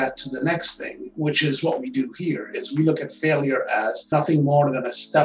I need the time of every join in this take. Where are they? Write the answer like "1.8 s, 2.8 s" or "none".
none